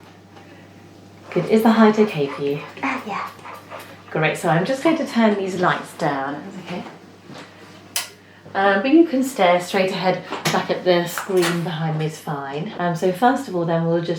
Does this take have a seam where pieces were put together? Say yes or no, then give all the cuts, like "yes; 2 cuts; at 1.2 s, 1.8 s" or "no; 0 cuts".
yes; 1 cut; at 12.7 s